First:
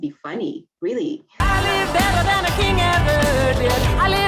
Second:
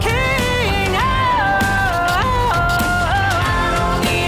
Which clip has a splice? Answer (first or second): first